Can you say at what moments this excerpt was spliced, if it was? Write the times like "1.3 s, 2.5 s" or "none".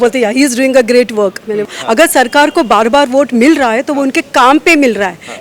1.7 s